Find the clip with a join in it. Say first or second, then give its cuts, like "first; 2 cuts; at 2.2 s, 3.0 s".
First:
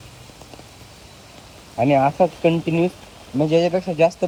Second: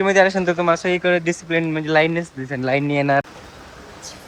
second; 1 cut; at 3.2 s